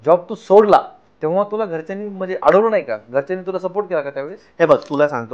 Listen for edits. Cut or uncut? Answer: uncut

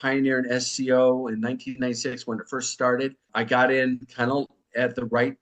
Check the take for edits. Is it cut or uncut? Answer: cut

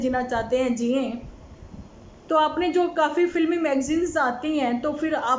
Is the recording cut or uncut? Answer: cut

